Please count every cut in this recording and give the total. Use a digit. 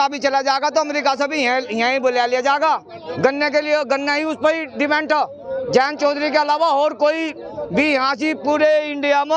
0